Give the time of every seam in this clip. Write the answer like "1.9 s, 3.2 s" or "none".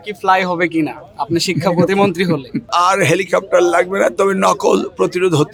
none